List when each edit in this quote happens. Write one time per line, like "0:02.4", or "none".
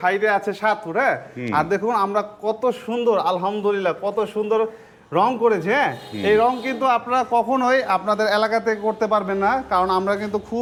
none